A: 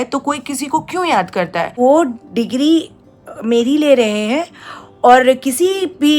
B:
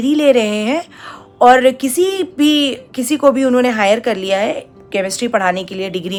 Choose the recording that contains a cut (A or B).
A